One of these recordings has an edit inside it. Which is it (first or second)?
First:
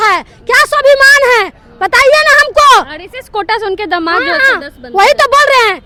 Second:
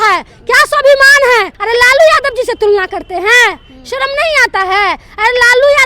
second